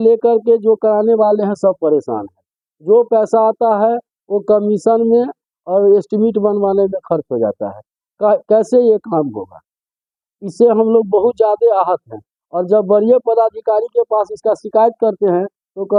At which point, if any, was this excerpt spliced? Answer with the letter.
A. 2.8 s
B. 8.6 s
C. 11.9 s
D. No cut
D